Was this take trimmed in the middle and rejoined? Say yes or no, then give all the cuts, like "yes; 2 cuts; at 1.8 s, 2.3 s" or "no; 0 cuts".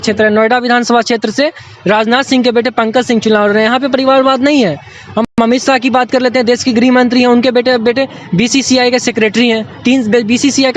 no; 0 cuts